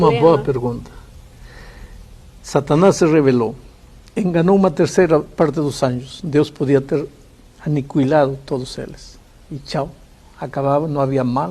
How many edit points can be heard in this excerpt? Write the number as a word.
one